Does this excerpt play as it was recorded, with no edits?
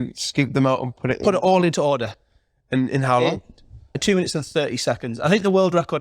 no; 1 cut; at 4.0 s

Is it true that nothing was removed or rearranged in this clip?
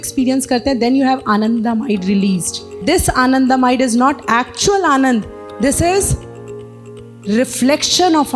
no; 1 cut; at 2.8 s

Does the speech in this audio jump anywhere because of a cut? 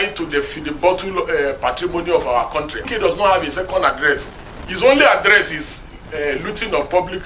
yes; 1 cut; at 2.8 s

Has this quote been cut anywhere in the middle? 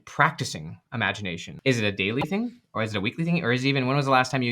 yes; 1 cut; at 1.4 s

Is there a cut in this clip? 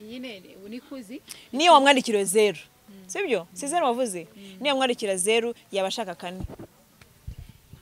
no; 0 cuts

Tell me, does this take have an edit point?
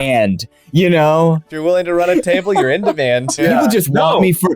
yes; 2 cuts; at 1.5 s, 3.4 s

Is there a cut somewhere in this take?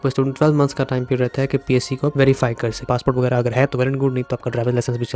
yes; 1 cut; at 2.8 s

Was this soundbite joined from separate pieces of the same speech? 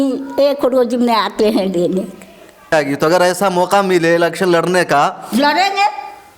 yes; 1 cut; at 2.7 s

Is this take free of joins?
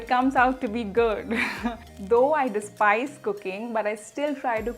yes; 0 cuts

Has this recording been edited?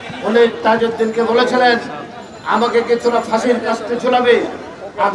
no; 0 cuts

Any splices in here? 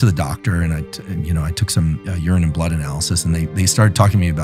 no; 0 cuts

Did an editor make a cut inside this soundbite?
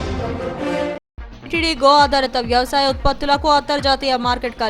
no; 0 cuts

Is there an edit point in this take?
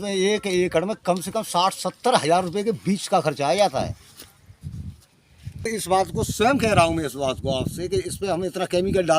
yes; 1 cut; at 5.7 s

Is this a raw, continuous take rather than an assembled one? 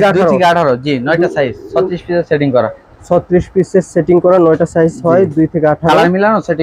yes; 0 cuts

